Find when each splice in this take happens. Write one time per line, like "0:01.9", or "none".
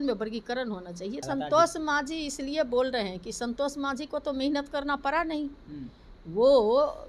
0:01.2

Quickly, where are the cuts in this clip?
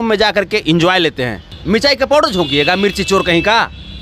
0:01.5

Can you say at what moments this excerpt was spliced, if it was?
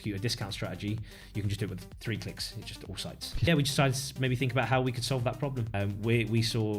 0:03.5
0:05.7

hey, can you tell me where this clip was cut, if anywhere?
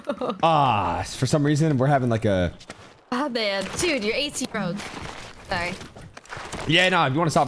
0:06.0

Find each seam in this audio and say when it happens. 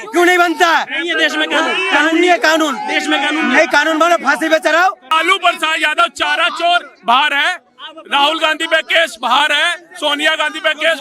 0:05.1

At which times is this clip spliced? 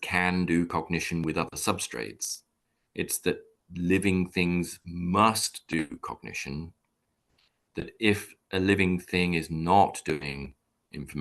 none

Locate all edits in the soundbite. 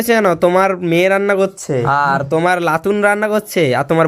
0:01.9

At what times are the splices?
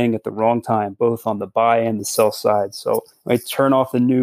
0:03.1

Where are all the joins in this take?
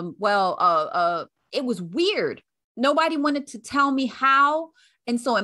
0:01.3

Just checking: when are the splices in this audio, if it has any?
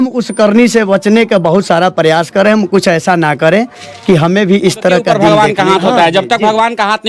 0:05.1

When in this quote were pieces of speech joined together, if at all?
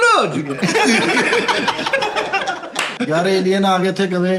0:02.9

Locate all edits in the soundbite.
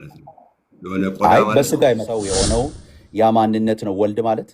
0:02.2

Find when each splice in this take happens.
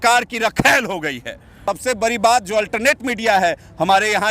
0:01.6

